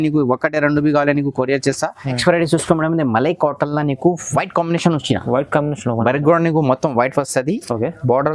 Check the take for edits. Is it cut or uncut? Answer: cut